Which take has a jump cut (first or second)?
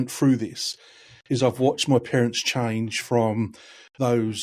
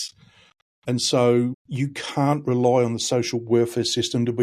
second